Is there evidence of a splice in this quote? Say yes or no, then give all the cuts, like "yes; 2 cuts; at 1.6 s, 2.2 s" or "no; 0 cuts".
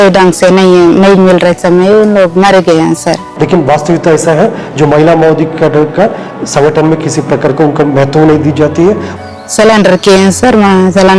yes; 2 cuts; at 3.3 s, 9.1 s